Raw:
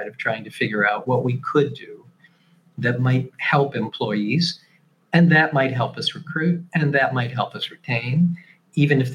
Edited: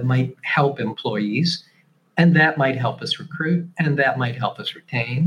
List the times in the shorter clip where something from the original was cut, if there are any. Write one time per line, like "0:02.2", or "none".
none